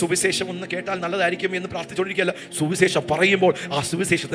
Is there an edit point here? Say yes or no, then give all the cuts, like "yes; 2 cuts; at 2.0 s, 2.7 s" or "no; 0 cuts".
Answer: no; 0 cuts